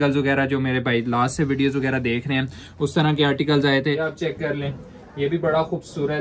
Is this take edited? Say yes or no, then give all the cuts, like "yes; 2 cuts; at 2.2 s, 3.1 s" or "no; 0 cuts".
yes; 1 cut; at 4.1 s